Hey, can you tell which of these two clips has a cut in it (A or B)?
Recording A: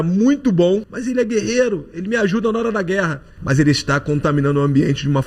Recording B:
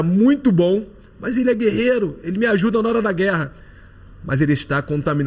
A